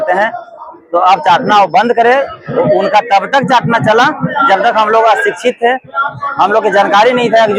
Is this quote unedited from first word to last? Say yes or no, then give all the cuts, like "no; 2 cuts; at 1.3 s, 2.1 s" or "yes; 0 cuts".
yes; 0 cuts